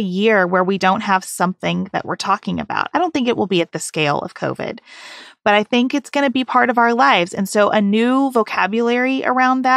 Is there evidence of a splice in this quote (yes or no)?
no